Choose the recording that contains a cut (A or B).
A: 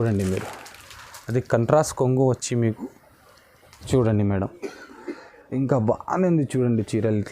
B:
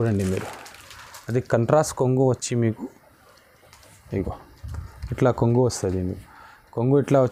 A